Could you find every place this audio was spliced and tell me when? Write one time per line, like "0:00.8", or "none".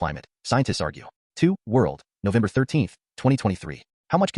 0:01.2